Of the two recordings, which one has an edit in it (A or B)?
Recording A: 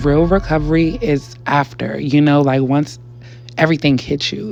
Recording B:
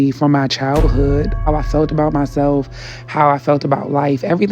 B